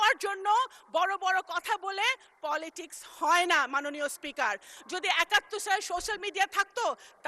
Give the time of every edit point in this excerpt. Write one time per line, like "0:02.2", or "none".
0:04.7